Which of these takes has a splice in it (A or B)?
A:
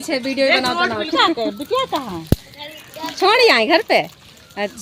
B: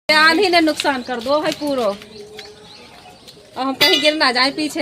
A